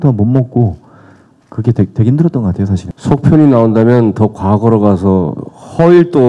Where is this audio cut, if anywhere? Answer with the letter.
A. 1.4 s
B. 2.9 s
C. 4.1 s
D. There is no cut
B